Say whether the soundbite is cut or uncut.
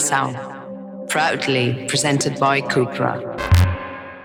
uncut